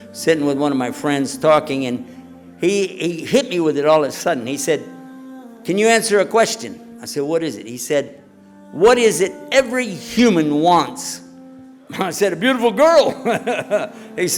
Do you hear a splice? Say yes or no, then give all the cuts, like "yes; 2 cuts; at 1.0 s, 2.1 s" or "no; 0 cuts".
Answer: no; 0 cuts